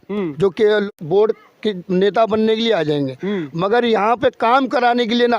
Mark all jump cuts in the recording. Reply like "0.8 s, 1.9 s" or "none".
0.9 s